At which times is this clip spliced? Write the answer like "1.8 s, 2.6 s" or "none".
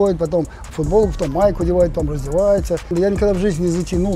2.9 s

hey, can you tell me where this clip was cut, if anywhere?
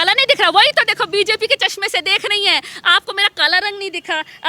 none

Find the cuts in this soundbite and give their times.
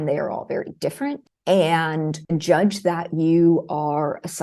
1.3 s, 2.2 s

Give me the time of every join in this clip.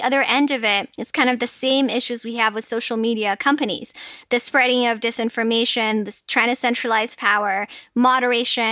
1.0 s

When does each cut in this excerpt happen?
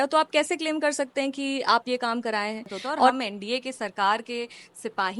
3.1 s

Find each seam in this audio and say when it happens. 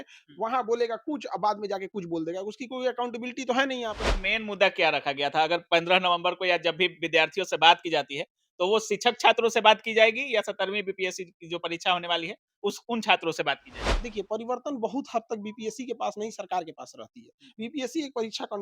4.1 s, 13.7 s

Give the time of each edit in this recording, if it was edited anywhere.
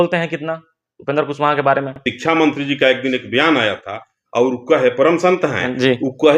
none

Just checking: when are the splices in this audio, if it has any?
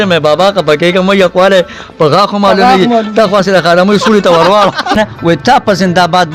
5.0 s

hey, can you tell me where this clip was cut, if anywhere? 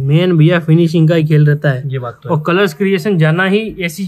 none

